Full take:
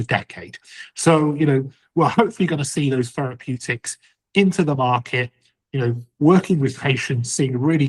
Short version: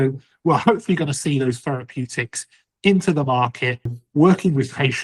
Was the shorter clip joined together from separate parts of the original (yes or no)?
yes